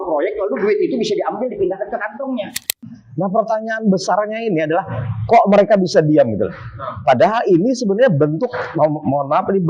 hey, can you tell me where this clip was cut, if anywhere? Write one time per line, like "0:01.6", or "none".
0:02.7